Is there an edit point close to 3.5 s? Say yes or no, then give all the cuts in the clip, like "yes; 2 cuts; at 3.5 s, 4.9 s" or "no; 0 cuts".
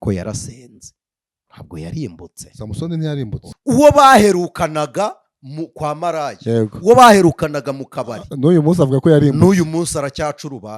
yes; 1 cut; at 3.5 s